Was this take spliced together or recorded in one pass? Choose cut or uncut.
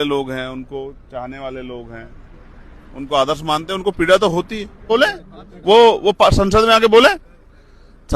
cut